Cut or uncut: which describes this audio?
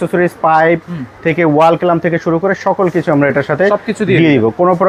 uncut